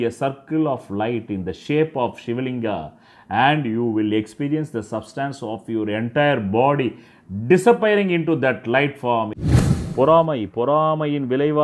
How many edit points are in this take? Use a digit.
1